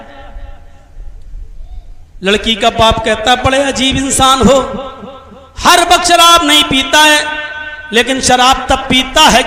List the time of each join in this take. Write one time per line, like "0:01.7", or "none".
none